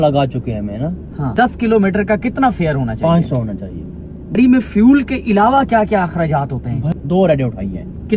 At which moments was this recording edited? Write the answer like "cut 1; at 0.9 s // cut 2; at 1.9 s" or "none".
cut 1; at 1.3 s // cut 2; at 4.4 s // cut 3; at 6.8 s